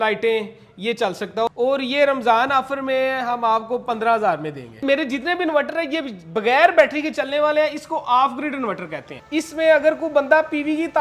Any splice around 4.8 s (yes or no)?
yes